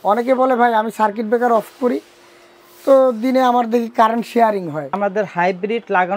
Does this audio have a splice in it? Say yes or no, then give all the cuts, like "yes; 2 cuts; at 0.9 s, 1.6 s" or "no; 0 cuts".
yes; 1 cut; at 5.0 s